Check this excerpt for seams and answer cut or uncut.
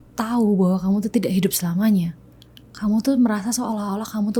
uncut